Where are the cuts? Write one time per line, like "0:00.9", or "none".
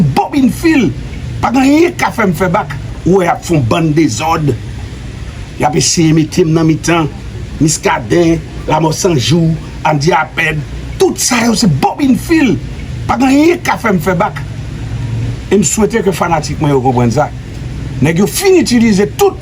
0:02.8